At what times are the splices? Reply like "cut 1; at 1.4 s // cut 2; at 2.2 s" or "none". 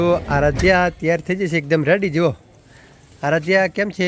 none